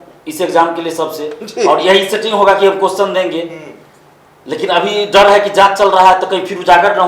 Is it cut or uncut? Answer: uncut